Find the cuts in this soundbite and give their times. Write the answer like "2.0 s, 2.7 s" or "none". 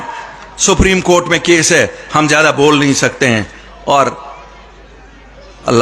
none